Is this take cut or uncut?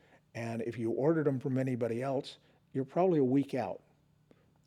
uncut